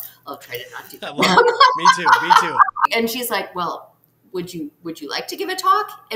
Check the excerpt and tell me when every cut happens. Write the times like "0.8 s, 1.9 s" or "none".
2.9 s